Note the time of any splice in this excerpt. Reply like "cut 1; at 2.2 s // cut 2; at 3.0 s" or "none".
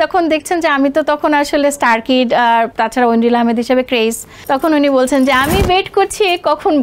cut 1; at 2.7 s // cut 2; at 4.3 s